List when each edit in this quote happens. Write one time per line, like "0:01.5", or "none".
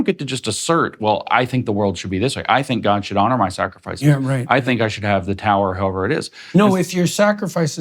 none